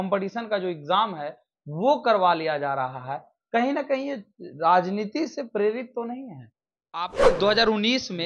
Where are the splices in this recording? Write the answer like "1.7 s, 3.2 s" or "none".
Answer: 7.2 s